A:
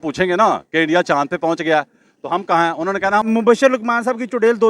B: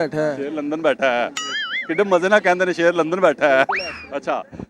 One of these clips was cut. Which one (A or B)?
A